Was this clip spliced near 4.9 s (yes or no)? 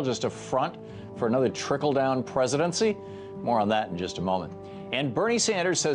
yes